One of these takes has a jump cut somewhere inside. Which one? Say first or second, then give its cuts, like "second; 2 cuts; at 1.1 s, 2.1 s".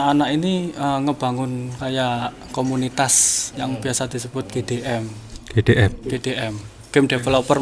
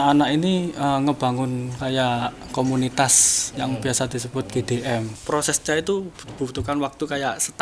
second; 1 cut; at 5.1 s